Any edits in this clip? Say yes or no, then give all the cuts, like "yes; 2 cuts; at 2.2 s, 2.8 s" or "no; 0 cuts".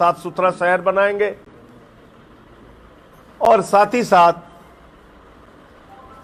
no; 0 cuts